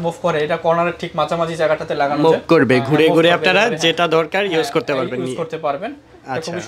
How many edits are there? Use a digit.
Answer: 0